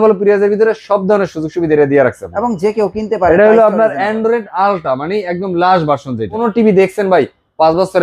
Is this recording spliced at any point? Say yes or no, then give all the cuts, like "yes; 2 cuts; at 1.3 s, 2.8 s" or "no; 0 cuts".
yes; 1 cut; at 6.4 s